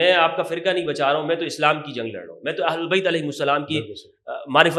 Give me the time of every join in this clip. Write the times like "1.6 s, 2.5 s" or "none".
none